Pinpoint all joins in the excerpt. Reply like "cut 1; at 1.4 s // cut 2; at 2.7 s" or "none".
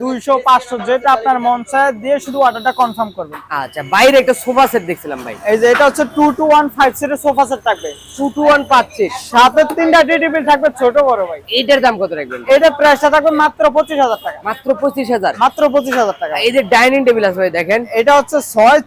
none